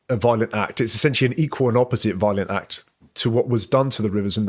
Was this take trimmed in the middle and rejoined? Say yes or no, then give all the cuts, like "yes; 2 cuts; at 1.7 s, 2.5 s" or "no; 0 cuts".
no; 0 cuts